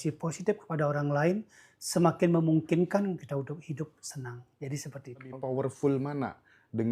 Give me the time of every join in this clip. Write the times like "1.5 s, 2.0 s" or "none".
5.4 s